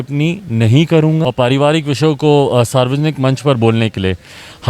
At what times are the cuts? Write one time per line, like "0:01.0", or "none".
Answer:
0:01.2

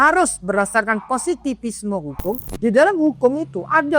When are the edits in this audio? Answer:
0:02.5

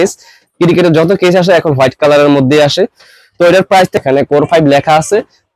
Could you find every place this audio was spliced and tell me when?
0:03.9

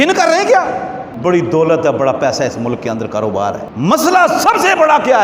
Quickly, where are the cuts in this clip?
0:01.1
0:03.7

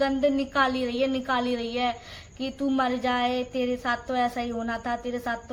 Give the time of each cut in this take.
none

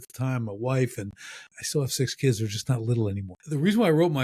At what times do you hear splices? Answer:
0:01.5
0:03.3

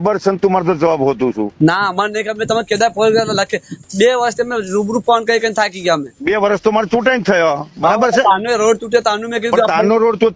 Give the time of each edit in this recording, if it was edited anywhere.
none

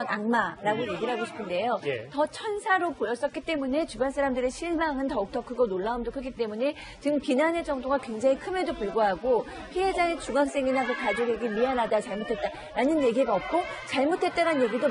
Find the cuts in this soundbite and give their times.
0:08.5

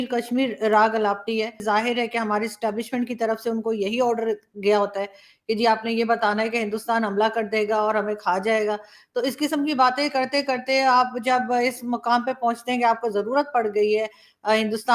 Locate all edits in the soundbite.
0:01.6

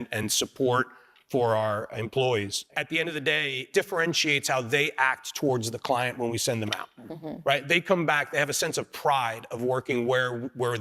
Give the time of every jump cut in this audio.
0:02.6
0:03.7

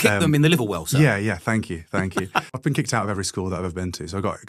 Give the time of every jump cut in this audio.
0:02.6

